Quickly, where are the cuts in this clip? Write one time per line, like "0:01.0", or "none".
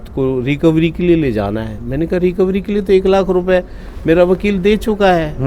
none